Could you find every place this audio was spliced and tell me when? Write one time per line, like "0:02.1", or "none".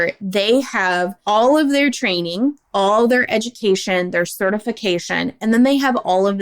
0:01.2